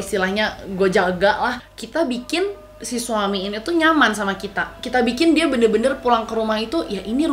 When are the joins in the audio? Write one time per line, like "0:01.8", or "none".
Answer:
0:01.6